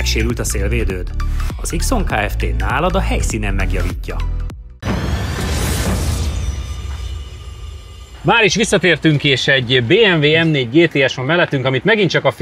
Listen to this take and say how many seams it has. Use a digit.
0